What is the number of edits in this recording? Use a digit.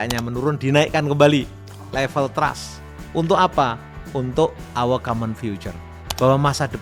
0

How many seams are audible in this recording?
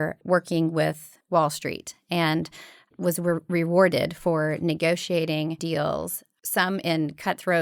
0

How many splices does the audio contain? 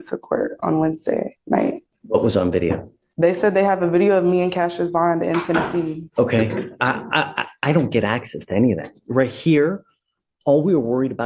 2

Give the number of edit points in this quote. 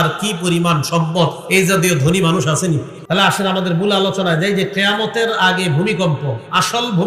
1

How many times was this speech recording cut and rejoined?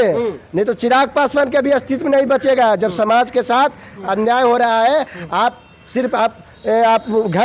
0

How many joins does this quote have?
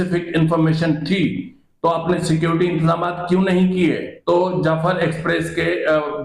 1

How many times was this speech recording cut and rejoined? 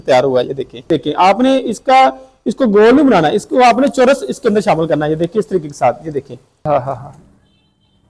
2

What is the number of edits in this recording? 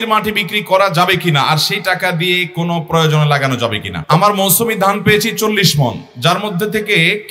1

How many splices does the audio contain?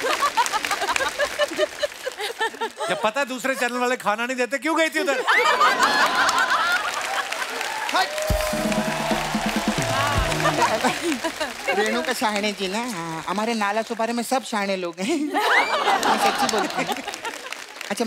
0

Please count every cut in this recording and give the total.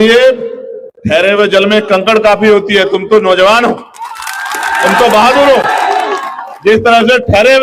0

